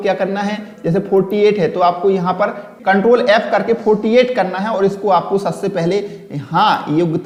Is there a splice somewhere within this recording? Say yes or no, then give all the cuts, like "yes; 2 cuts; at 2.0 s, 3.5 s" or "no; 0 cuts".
no; 0 cuts